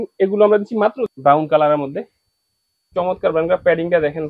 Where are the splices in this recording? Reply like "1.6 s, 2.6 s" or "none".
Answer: 1.1 s